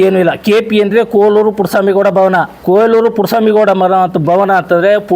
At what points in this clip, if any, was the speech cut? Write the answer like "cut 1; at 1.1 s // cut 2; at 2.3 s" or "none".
cut 1; at 2.5 s